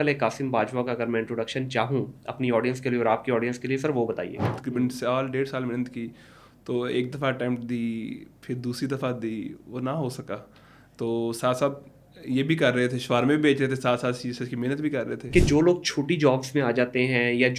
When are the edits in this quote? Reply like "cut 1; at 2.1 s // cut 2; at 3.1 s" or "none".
cut 1; at 4.6 s // cut 2; at 15.2 s

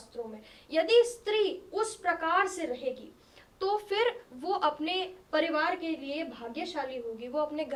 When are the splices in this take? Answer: none

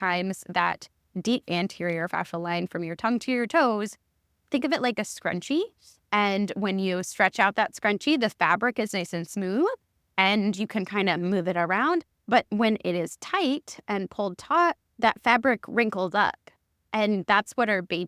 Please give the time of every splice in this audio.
cut 1; at 1.4 s // cut 2; at 4.4 s

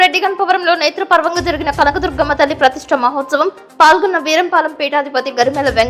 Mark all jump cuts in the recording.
none

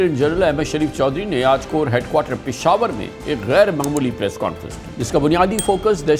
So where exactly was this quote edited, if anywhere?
cut 1; at 4.8 s

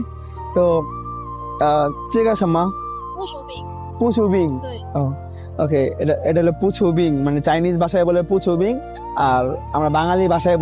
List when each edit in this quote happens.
none

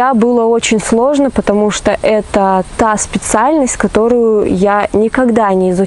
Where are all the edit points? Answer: none

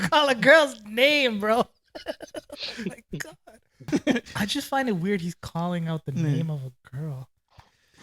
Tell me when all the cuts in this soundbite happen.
cut 1; at 3.8 s

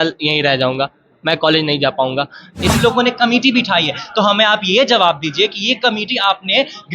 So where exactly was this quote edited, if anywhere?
cut 1; at 2.7 s

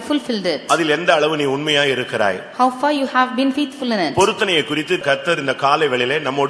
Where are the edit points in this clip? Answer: cut 1; at 5.0 s

